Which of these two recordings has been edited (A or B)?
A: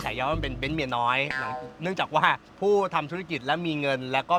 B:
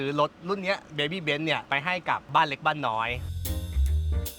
B